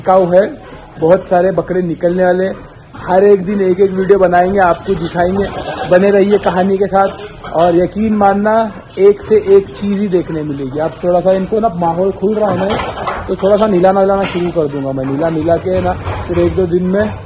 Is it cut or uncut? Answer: uncut